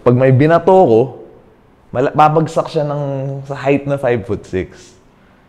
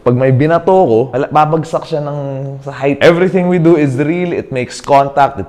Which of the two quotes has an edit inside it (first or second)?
second